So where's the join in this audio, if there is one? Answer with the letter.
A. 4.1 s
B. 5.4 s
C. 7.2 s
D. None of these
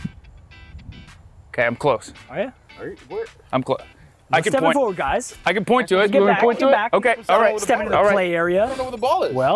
D